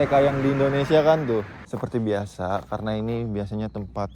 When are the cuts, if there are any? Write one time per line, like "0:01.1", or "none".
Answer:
0:01.6